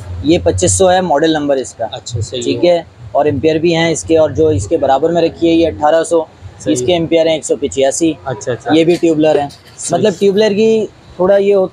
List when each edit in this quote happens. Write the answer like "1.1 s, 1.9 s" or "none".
none